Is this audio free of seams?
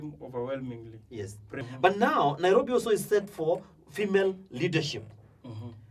no; 1 cut; at 1.6 s

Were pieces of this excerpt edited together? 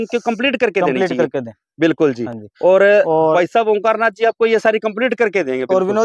no; 0 cuts

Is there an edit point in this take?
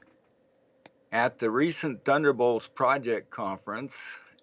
yes; 1 cut; at 1.2 s

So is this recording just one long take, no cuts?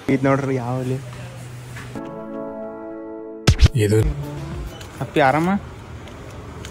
no; 1 cut; at 4.0 s

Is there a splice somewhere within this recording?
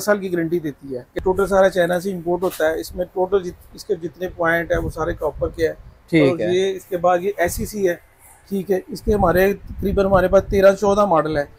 yes; 1 cut; at 1.1 s

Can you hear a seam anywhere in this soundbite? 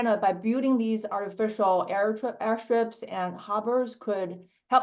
no; 0 cuts

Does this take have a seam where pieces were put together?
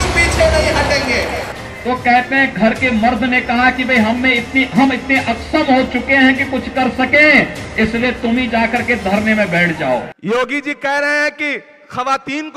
yes; 2 cuts; at 1.5 s, 10.1 s

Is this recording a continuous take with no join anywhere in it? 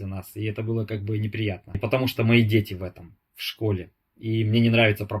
yes; 0 cuts

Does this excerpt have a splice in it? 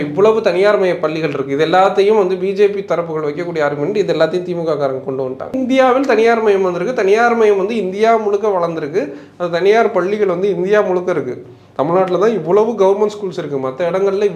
yes; 1 cut; at 5.5 s

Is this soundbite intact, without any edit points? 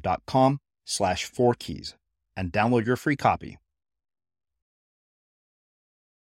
yes; 0 cuts

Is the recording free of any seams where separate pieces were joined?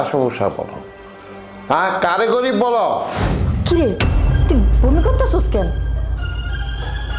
no; 1 cut; at 3.4 s

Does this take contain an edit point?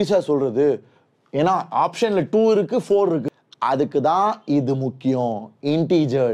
yes; 1 cut; at 3.3 s

